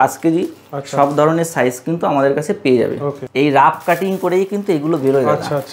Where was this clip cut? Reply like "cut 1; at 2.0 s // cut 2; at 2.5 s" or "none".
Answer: cut 1; at 3.1 s